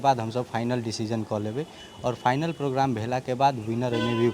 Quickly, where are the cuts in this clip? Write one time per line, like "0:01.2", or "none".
none